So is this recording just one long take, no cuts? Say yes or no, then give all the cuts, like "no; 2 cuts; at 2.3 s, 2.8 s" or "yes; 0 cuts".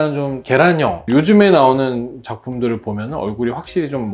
no; 1 cut; at 1.0 s